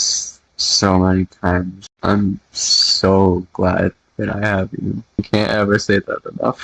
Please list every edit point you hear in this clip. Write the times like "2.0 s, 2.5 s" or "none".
1.8 s, 5.2 s